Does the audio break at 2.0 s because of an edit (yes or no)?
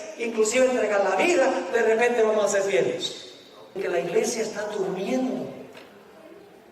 no